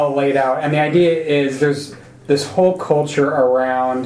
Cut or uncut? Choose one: uncut